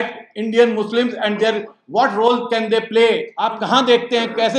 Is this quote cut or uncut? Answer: cut